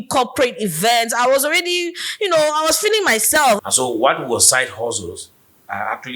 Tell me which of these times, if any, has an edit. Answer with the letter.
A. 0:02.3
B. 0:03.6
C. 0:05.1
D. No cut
B